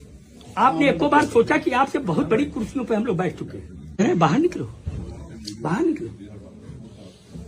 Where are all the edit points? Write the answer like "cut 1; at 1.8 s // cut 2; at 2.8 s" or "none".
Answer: cut 1; at 4.0 s